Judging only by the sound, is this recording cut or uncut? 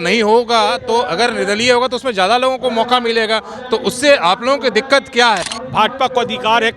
cut